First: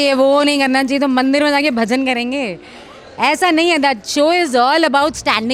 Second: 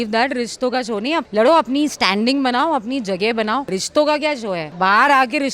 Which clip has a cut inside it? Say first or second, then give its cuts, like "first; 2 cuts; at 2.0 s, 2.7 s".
second; 3 cuts; at 1.3 s, 3.8 s, 4.7 s